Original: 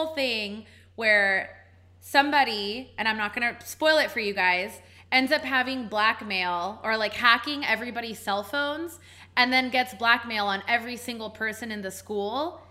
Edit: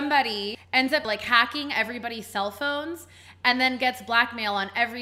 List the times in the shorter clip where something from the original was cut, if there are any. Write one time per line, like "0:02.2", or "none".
0:00.9